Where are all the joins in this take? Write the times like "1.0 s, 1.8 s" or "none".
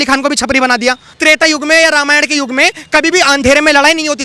1.2 s